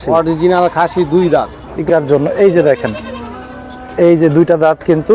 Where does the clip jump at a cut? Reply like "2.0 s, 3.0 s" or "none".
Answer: 1.9 s

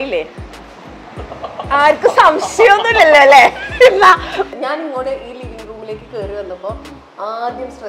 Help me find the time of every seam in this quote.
4.5 s

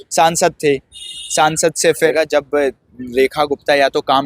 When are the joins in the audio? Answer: 2.1 s

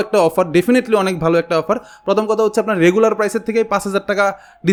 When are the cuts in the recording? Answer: none

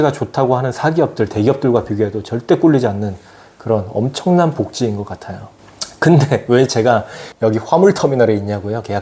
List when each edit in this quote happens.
none

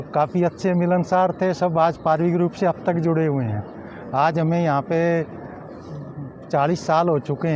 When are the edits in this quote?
none

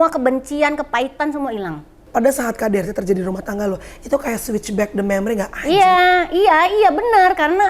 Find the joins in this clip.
2.0 s

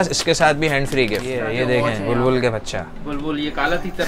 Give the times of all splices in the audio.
1.4 s

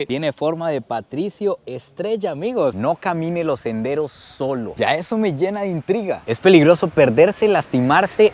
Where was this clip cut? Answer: 2.7 s

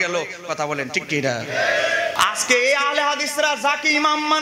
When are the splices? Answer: 2.1 s

